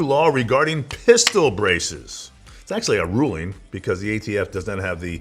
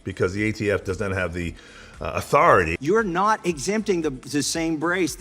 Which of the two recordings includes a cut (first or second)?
second